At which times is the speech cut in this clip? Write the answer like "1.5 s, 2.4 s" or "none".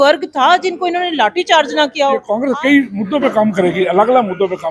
2.4 s